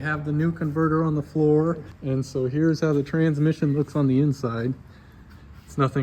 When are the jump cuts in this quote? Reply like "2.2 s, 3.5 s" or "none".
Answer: 1.9 s